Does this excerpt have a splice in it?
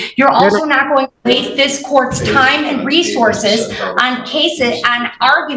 no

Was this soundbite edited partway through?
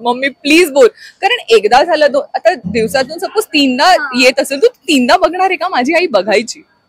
no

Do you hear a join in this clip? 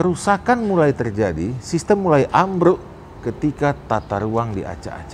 no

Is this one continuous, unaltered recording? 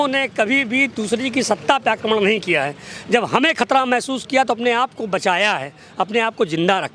yes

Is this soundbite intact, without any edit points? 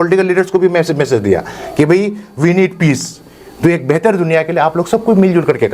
yes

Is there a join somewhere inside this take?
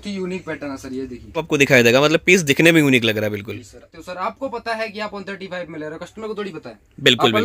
yes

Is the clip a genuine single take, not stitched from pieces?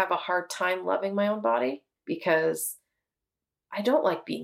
no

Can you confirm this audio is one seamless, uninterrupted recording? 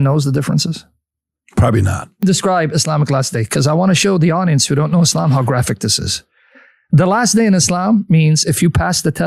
no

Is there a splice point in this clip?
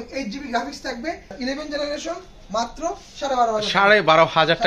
yes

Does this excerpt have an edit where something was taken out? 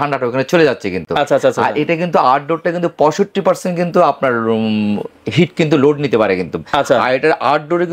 no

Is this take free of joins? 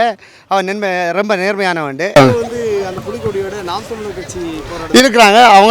no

